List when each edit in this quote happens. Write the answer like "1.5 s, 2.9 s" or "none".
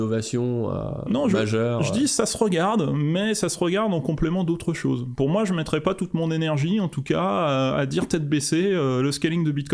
none